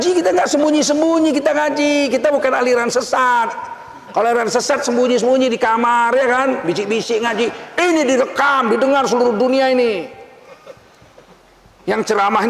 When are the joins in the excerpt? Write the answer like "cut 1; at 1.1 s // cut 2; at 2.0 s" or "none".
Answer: none